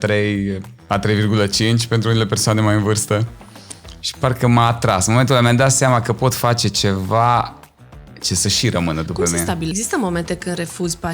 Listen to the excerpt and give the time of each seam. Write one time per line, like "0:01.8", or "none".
0:09.7